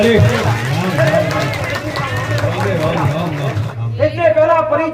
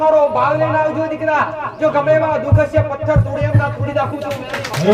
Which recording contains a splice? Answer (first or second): first